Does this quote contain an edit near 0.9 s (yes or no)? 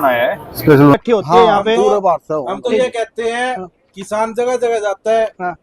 yes